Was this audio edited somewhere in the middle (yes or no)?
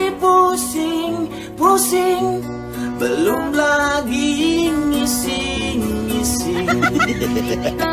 no